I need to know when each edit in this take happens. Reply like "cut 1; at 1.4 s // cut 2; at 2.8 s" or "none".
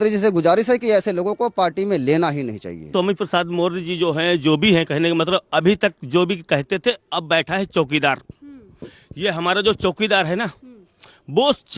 cut 1; at 2.9 s